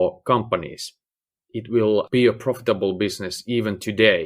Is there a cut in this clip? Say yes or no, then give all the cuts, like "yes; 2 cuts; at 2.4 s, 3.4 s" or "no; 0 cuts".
yes; 1 cut; at 2.1 s